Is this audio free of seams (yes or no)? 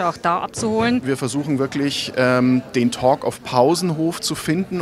no